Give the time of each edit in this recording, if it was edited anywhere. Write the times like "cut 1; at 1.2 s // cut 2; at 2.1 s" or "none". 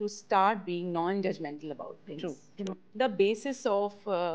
cut 1; at 2.8 s